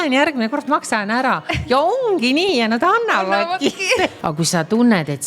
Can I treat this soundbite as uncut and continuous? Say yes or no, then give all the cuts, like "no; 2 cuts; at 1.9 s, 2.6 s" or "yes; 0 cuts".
no; 1 cut; at 4.2 s